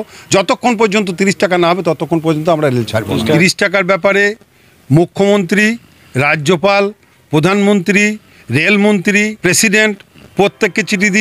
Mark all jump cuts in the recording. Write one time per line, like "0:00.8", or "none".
0:03.4
0:09.3